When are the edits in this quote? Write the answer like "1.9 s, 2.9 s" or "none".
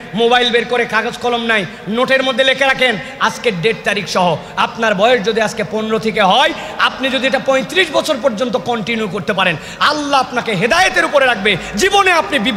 none